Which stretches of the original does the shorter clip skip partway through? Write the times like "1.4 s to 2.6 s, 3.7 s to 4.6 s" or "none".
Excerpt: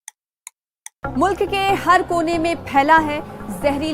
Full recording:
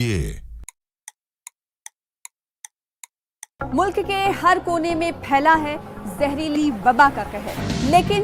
2.0 s to 3.5 s